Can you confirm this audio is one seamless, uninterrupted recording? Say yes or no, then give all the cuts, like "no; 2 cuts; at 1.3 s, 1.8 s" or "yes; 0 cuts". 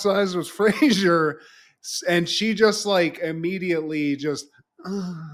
yes; 0 cuts